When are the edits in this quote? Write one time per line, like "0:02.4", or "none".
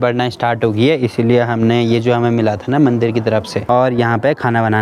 0:03.6